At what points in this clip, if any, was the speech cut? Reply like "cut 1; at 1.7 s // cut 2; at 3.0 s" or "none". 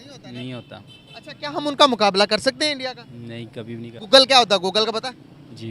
cut 1; at 4.0 s

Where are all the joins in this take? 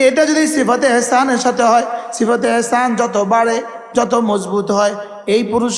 none

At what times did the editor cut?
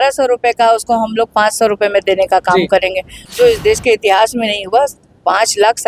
cut 1; at 3.2 s

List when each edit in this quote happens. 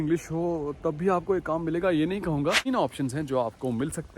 cut 1; at 2.6 s

